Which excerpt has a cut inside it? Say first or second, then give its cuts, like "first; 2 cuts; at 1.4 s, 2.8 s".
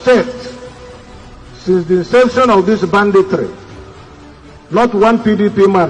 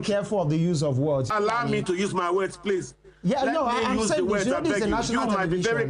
second; 1 cut; at 1.3 s